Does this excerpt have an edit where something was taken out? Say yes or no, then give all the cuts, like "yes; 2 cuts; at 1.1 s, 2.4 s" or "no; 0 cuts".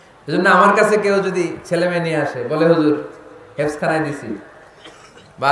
no; 0 cuts